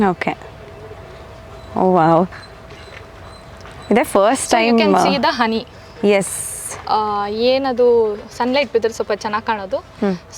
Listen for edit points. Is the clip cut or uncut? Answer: uncut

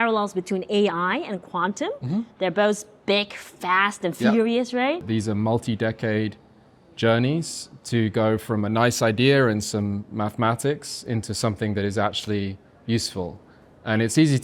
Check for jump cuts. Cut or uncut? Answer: cut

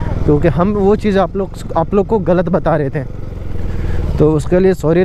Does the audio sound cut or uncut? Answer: uncut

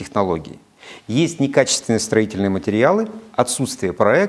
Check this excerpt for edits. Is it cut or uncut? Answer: uncut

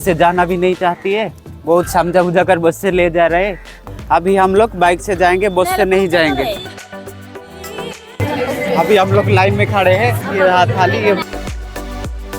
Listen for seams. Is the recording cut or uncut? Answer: cut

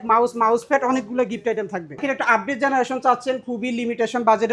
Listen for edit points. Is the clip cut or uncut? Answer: cut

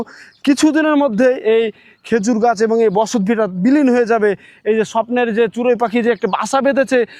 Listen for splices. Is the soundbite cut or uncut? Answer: uncut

